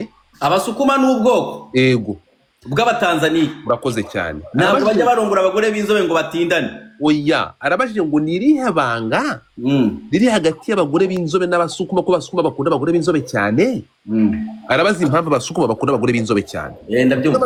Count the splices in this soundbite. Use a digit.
0